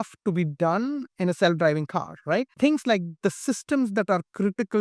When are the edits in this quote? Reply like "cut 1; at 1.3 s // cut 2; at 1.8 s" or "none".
cut 1; at 2.5 s